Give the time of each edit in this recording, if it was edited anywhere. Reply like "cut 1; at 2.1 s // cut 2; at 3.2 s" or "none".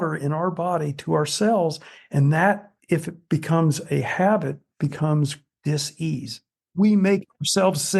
cut 1; at 5.5 s // cut 2; at 6.5 s